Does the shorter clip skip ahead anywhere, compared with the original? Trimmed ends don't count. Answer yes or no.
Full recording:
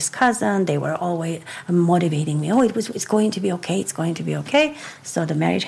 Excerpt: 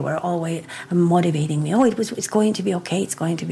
no